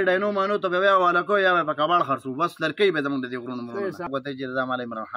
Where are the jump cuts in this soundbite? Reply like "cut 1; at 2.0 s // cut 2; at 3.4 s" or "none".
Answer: cut 1; at 4.1 s